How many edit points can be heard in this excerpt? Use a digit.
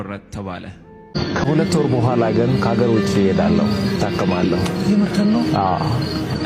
1